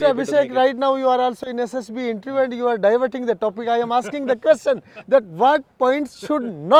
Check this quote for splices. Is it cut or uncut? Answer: uncut